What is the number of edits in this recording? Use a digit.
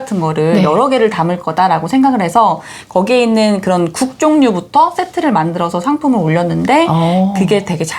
0